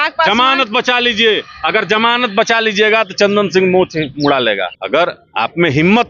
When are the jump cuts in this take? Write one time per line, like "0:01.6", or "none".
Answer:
none